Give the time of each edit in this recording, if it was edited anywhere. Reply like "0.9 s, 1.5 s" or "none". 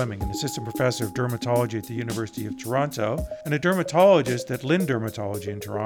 3.3 s